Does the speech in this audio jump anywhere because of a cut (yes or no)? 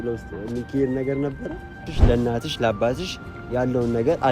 yes